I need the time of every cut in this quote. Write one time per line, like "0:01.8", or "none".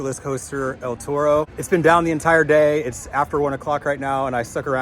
0:01.6